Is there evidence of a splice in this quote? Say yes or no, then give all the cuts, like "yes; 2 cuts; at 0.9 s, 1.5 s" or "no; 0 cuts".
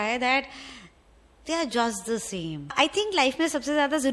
yes; 1 cut; at 2.7 s